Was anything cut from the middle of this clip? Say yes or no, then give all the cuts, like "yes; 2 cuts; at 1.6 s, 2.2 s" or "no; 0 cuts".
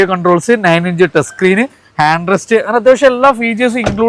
no; 0 cuts